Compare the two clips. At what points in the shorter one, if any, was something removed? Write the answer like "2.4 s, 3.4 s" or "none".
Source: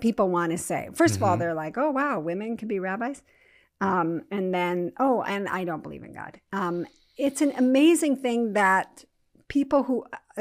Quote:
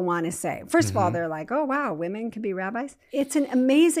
3.0 s